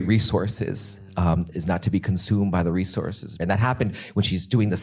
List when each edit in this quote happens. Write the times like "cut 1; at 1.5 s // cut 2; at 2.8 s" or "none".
cut 1; at 3.4 s